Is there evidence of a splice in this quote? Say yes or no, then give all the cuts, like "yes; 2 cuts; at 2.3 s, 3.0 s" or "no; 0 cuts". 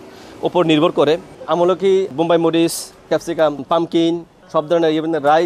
yes; 3 cuts; at 2.1 s, 3.2 s, 4.3 s